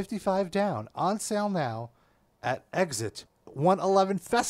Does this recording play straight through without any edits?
no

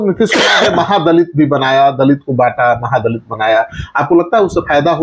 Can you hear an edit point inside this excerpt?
no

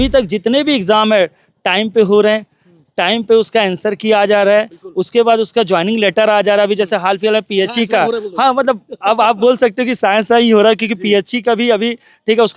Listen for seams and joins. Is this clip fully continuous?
yes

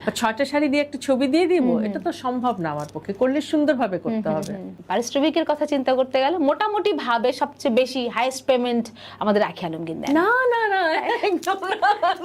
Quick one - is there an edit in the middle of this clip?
yes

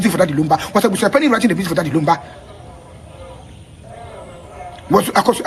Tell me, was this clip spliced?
no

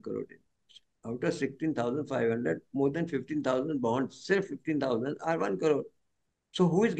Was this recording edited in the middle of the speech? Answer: no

